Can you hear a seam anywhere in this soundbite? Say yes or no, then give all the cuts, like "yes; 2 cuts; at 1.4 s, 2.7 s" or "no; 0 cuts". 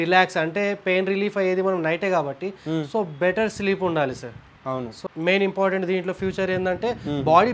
yes; 1 cut; at 4.9 s